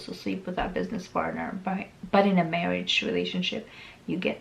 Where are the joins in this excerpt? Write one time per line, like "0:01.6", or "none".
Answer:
none